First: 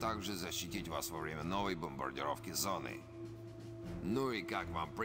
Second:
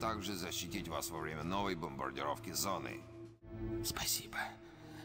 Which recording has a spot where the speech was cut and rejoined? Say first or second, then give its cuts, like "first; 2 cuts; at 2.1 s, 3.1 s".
second; 1 cut; at 3.5 s